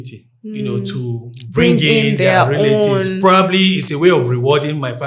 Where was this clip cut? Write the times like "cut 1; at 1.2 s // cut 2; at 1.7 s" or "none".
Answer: none